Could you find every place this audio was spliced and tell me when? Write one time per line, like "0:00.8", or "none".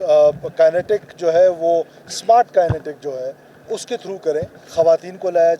0:04.6